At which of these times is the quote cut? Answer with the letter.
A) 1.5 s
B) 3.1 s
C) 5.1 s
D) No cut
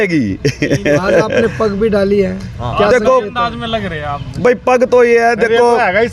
D